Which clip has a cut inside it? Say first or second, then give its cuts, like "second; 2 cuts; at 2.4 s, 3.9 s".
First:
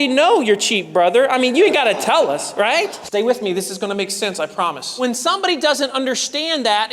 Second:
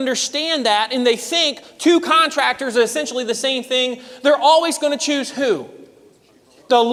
first; 2 cuts; at 3.0 s, 4.9 s